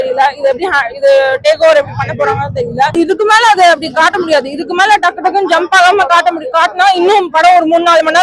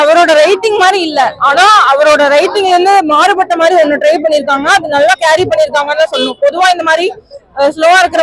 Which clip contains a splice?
first; 1 cut; at 2.9 s

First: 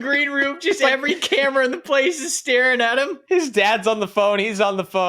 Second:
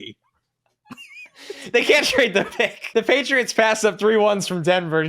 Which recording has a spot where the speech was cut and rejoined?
second; 1 cut; at 2.8 s

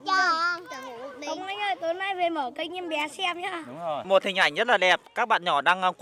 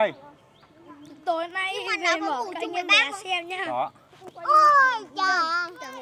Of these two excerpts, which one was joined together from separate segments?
first; 1 cut; at 4.0 s

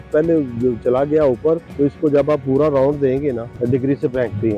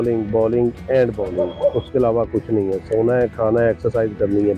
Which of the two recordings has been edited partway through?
first; 2 cuts; at 1.7 s, 3.5 s

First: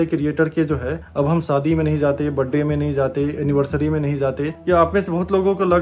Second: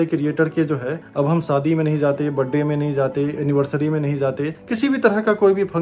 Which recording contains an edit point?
first; 1 cut; at 4.5 s

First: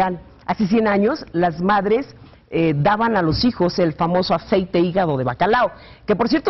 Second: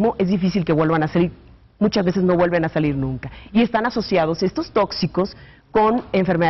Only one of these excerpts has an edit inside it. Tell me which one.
second; 1 cut; at 1.9 s

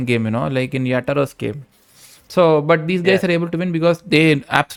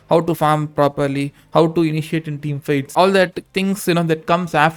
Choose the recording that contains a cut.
second; 1 cut; at 2.9 s

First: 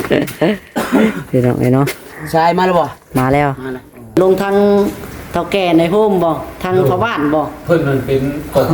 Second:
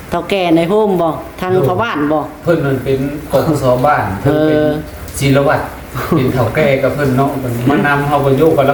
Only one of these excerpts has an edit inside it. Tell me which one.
first; 1 cut; at 4.2 s

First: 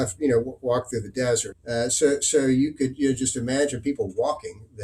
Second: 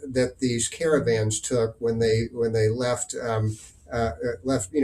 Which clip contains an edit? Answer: first; 1 cut; at 1.5 s

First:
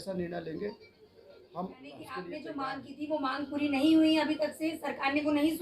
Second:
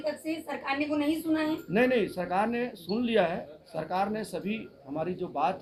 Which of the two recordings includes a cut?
first; 1 cut; at 2.3 s

